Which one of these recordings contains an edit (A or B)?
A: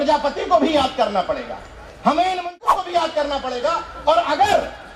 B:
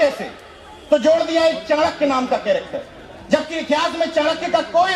A